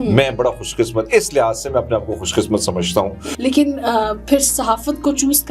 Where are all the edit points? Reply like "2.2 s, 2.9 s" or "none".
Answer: 3.2 s